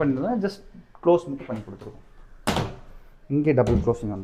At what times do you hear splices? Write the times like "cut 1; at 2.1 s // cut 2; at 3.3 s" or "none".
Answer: none